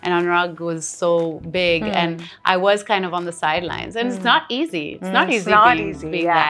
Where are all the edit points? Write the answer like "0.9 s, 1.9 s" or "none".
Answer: none